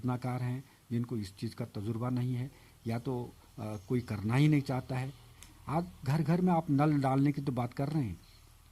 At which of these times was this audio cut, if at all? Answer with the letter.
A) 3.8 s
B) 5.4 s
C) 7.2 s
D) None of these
B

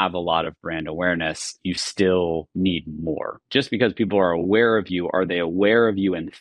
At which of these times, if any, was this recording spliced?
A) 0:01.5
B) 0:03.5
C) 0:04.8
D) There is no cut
B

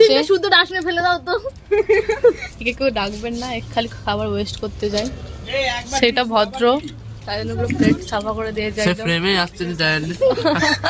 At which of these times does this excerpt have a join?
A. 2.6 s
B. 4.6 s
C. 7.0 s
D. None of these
D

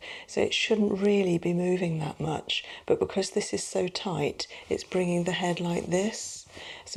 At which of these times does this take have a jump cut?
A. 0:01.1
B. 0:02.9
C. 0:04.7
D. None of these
D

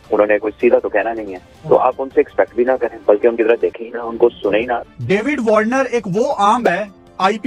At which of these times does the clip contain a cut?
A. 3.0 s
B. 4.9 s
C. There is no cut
B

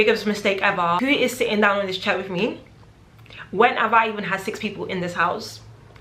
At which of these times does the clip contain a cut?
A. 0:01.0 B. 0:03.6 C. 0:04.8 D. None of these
A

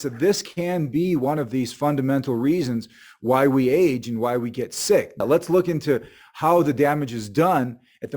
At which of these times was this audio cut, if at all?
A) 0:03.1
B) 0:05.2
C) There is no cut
B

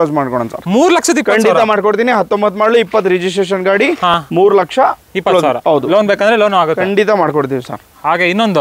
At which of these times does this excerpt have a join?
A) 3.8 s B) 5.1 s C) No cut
C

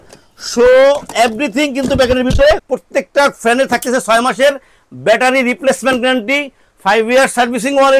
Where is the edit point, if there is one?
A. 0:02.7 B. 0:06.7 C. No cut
A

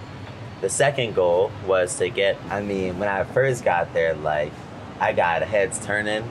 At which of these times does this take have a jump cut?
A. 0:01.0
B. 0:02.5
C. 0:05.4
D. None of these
B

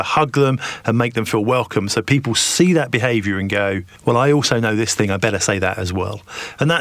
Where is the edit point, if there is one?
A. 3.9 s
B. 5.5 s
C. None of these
A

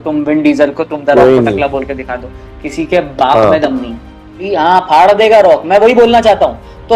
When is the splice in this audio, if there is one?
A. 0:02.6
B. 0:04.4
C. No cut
B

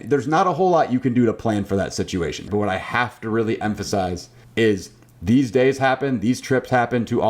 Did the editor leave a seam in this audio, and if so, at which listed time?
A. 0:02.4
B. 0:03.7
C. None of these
A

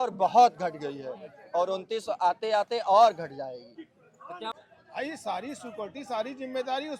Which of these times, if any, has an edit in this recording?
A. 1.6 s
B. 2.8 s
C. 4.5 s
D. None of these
C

